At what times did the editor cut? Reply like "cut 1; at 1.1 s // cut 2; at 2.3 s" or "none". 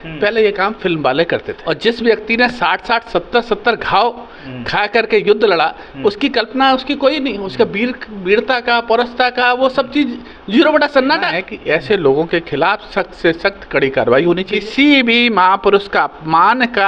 cut 1; at 1.5 s // cut 2; at 11.5 s // cut 3; at 14.5 s